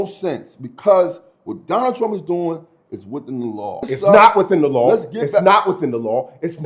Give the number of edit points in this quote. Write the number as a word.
one